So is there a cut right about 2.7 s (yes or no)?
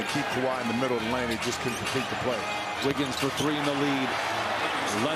no